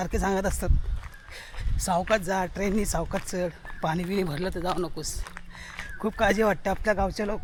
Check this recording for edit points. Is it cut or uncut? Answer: uncut